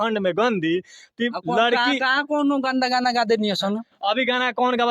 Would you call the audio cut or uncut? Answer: uncut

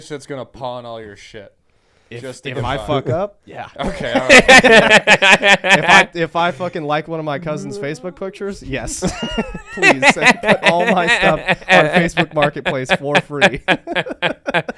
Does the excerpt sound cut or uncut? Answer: uncut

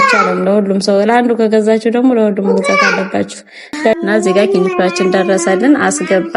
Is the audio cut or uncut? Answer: cut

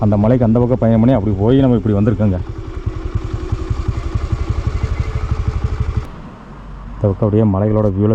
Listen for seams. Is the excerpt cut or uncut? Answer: cut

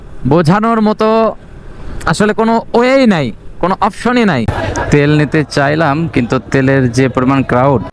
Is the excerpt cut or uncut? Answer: cut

